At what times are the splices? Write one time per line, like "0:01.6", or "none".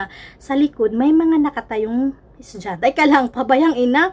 0:03.1